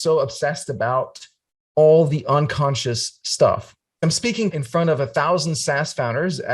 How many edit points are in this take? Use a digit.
1